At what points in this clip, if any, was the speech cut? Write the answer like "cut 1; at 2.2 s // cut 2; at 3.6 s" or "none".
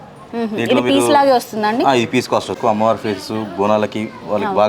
cut 1; at 2.6 s